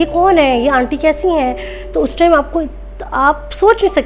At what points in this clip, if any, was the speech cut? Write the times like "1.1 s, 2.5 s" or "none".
none